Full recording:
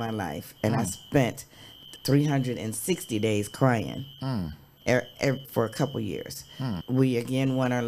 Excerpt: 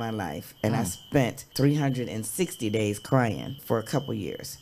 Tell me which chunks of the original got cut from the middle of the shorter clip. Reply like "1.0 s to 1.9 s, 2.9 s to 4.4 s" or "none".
1.4 s to 1.9 s, 4.1 s to 5.4 s